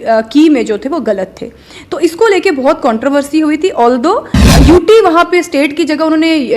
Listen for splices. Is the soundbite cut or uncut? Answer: cut